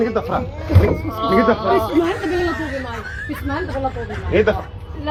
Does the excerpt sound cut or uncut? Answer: uncut